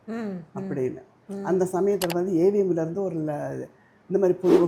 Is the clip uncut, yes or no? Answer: yes